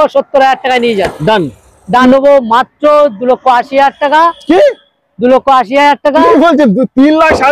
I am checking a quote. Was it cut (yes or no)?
yes